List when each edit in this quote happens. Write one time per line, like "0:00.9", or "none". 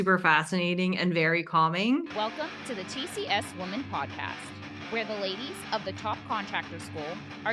0:02.1